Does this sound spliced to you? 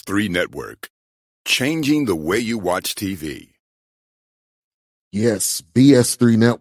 no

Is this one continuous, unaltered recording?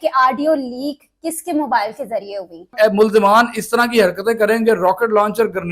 no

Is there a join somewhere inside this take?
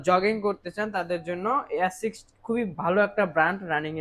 no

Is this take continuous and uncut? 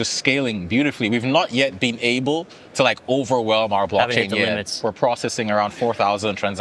no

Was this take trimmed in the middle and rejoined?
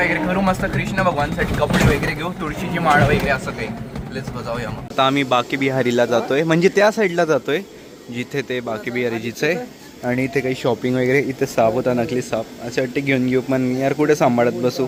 no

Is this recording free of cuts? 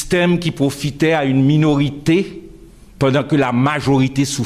no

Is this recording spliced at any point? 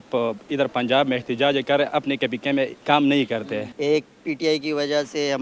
yes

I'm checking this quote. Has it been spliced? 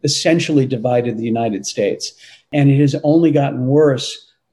yes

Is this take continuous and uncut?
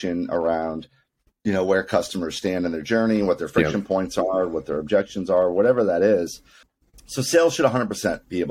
yes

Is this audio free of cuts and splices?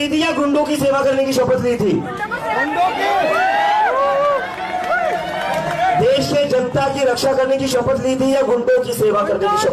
yes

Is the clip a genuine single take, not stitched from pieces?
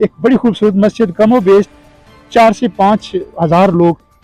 yes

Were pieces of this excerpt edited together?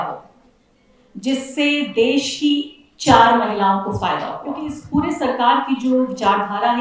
yes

